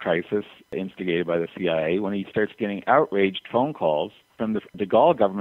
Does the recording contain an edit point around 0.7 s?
yes; 2 cuts; at 0.7 s, 4.4 s

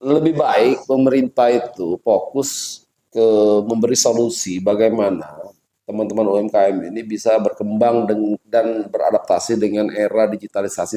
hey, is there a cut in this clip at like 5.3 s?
no; 0 cuts

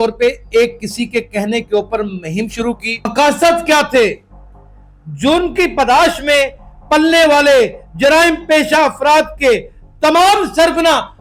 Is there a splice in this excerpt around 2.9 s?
yes; 1 cut; at 2.9 s

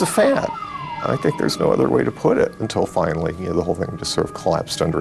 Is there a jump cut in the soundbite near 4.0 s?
no; 1 cut; at 2.6 s

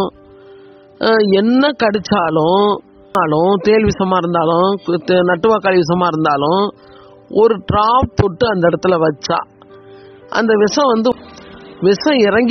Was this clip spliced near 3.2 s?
yes; 2 cuts; at 3.2 s, 11.1 s

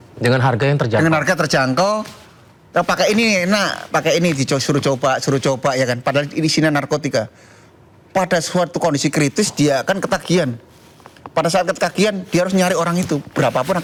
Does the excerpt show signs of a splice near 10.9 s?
no; 0 cuts

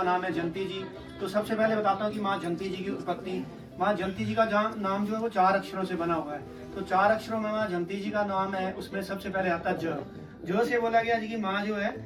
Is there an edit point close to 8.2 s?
no; 0 cuts

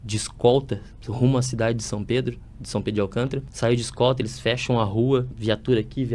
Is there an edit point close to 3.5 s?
yes; 2 cuts; at 3.5 s, 5.3 s

